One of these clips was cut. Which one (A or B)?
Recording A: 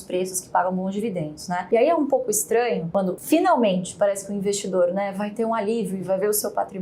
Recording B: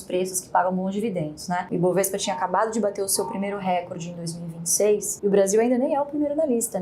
B